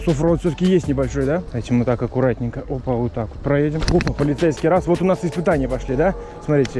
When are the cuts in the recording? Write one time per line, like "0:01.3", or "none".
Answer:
0:01.5
0:03.8